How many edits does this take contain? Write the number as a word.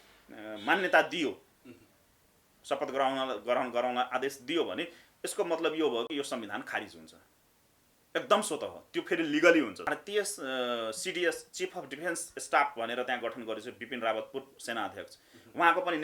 one